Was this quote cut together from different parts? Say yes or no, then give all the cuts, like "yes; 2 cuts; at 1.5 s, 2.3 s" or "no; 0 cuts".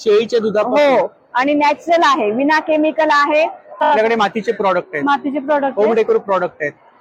yes; 1 cut; at 3.8 s